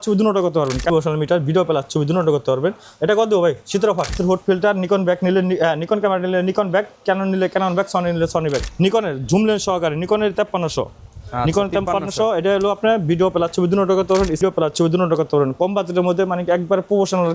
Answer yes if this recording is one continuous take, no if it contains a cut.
no